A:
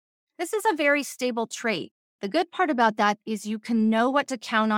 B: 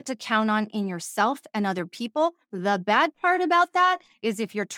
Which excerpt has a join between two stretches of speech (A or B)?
A